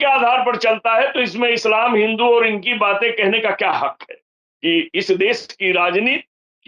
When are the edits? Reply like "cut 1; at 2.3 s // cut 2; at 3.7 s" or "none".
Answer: cut 1; at 4.4 s

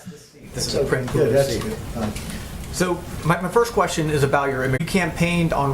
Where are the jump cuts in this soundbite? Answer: cut 1; at 4.8 s

